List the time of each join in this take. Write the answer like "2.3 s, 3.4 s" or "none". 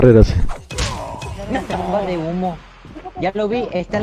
1.8 s